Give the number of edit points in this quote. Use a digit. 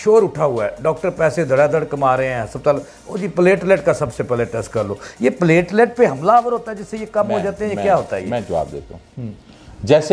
0